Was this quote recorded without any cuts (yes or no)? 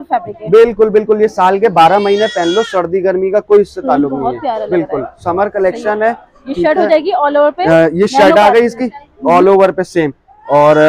yes